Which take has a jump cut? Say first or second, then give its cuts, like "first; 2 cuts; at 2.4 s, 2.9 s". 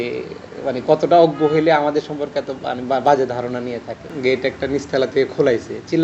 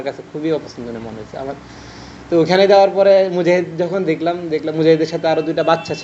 first; 1 cut; at 4.0 s